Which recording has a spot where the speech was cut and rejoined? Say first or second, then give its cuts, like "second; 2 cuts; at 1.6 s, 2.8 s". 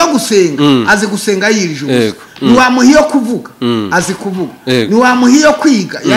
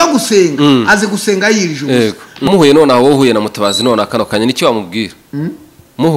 second; 1 cut; at 2.5 s